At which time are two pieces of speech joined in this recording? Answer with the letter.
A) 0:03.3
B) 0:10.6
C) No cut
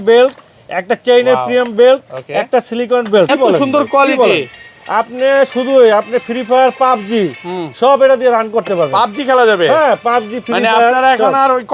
A